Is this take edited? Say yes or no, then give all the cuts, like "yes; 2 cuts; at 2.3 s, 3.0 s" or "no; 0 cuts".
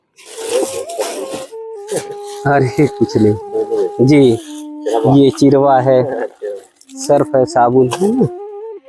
no; 0 cuts